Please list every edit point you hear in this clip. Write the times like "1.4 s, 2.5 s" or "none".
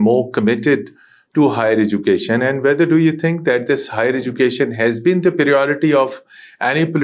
none